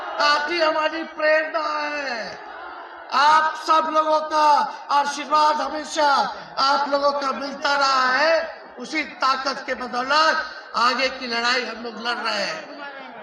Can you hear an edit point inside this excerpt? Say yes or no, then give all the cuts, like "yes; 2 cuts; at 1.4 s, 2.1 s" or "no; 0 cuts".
no; 0 cuts